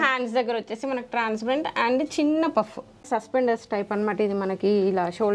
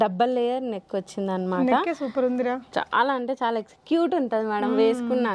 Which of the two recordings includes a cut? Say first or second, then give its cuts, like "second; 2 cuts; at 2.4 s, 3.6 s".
first; 1 cut; at 3.0 s